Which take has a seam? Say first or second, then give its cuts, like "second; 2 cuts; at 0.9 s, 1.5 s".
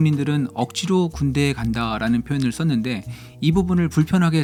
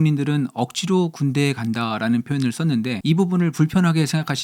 second; 1 cut; at 3.0 s